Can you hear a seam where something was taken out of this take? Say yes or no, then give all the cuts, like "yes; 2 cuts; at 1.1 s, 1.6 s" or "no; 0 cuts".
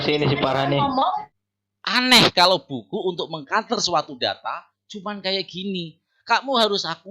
yes; 1 cut; at 1.4 s